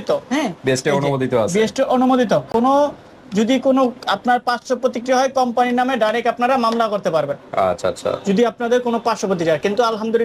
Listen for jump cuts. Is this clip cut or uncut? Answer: uncut